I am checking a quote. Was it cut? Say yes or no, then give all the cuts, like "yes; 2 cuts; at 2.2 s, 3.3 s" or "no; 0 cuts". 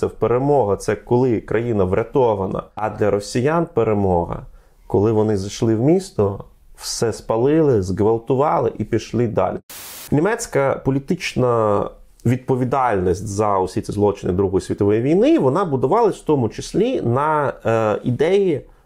yes; 2 cuts; at 2.7 s, 9.6 s